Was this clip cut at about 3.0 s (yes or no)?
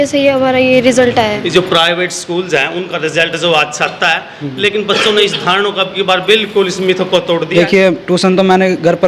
no